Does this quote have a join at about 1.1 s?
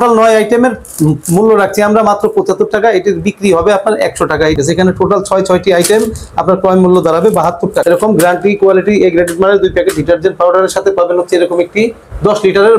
no; 2 cuts; at 4.6 s, 7.8 s

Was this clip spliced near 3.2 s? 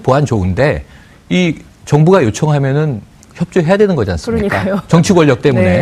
no; 1 cut; at 4.8 s

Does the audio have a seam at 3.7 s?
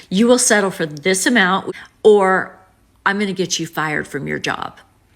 no; 1 cut; at 1.7 s

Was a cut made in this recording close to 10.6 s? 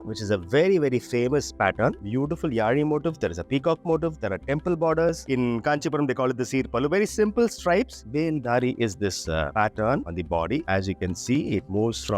no; 3 cuts; at 2.0 s, 5.2 s, 8.0 s

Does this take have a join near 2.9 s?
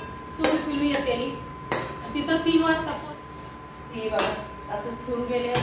yes; 1 cut; at 2.9 s

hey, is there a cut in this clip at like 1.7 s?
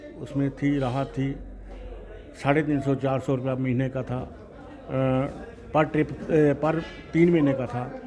no; 0 cuts

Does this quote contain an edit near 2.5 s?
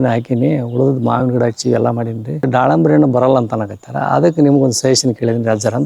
yes; 1 cut; at 2.5 s

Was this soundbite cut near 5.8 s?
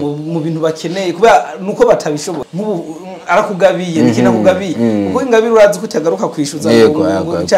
no; 1 cut; at 2.3 s

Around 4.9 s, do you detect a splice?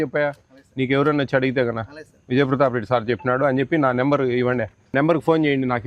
yes; 1 cut; at 4.9 s

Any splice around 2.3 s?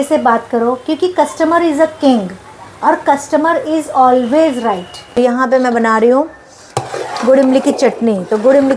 no; 1 cut; at 5.2 s

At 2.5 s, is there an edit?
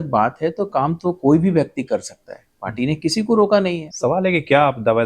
no; 1 cut; at 3.8 s

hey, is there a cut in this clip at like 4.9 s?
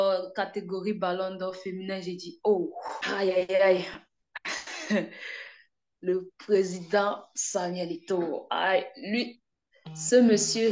no; 1 cut; at 2.9 s

